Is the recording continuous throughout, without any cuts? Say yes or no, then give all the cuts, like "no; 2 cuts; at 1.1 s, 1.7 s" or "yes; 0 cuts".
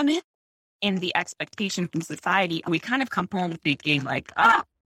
no; 1 cut; at 2.7 s